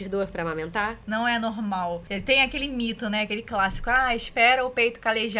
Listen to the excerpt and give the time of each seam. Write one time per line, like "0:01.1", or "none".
0:01.0
0:02.1